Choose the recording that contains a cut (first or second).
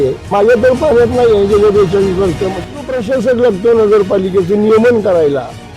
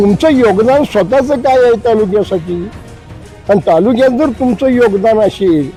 first